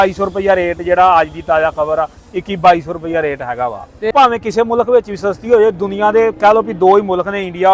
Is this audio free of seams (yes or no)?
no